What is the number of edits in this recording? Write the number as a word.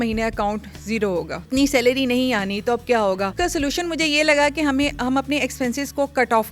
zero